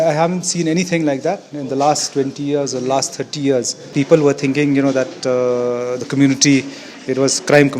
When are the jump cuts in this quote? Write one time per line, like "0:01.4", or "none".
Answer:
0:03.8